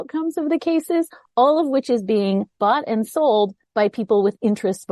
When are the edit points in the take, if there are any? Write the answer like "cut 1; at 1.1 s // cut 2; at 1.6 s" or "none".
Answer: none